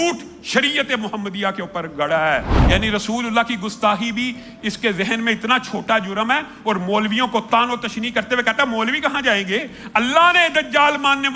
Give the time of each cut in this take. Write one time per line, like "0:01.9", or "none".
0:02.5